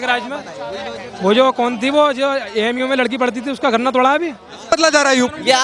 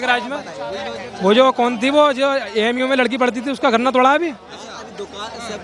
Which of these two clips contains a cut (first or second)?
first